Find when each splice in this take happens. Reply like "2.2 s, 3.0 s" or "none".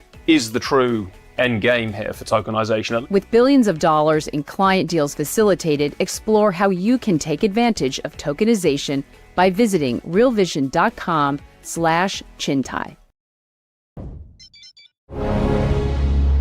14.0 s